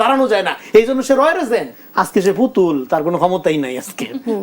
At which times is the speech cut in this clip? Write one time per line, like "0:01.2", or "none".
0:01.8